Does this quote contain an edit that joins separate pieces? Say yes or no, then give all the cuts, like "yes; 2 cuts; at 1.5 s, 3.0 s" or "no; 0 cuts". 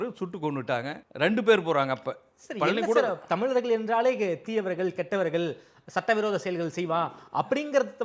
yes; 1 cut; at 1.0 s